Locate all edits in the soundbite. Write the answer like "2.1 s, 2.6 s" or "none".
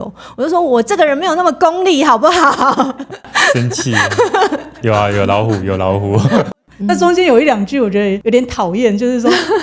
4.7 s, 6.5 s, 8.2 s